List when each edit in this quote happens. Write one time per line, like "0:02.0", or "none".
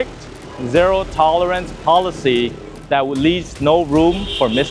none